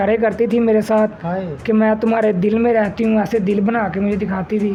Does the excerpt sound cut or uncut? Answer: uncut